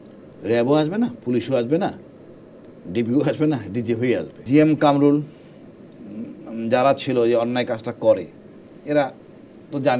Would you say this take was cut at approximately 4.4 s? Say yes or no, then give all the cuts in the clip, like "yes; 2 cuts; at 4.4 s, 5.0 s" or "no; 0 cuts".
yes; 1 cut; at 4.4 s